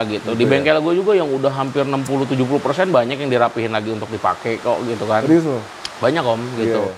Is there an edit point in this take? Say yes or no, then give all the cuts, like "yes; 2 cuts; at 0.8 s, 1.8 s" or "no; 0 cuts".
no; 0 cuts